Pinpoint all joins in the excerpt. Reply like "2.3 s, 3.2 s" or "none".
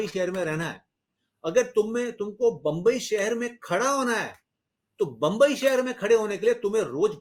none